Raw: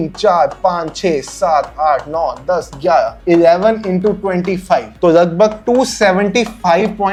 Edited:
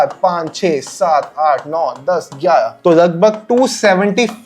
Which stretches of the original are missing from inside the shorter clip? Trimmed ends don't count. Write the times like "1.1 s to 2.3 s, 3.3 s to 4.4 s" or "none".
3.1 s to 4.9 s

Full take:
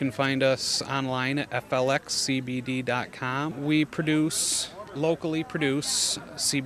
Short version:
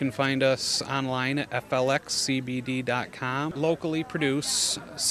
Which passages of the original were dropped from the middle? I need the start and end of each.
3.5 s to 4.9 s

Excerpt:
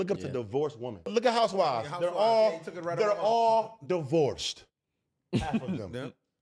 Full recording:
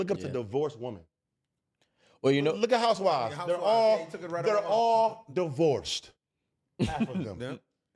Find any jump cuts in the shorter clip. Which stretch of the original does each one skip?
1.1 s to 2.6 s

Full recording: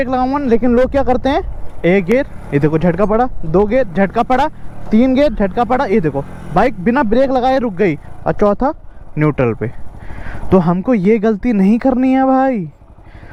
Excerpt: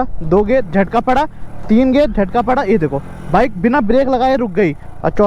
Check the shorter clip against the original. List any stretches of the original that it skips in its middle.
none

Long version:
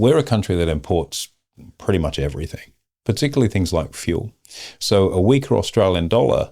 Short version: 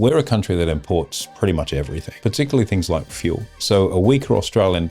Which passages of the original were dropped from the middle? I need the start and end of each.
1.2 s to 1.7 s, 2.5 s to 2.9 s, 4.3 s to 4.7 s

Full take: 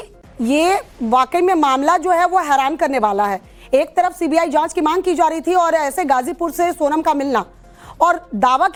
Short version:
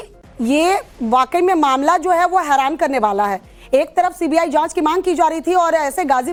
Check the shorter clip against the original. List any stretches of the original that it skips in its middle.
none

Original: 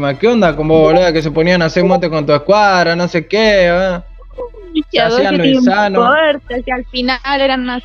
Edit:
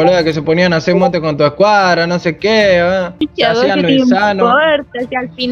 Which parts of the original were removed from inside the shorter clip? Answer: 4.0 s to 4.7 s

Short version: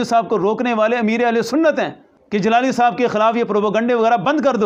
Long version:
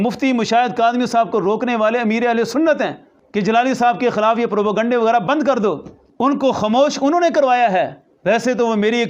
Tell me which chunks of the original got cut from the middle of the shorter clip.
none

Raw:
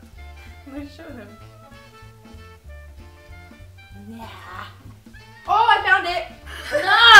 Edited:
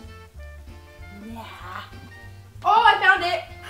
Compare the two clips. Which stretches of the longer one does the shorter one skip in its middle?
3.4 s to 3.9 s

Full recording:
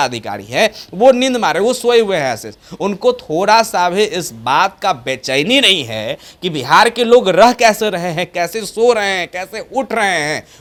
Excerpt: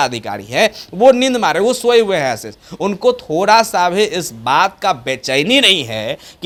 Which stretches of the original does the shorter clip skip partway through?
none

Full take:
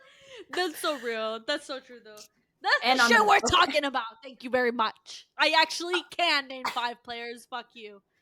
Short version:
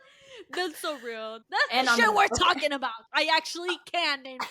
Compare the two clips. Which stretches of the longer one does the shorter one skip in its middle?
1.4 s to 2.5 s, 4.1 s to 5.3 s

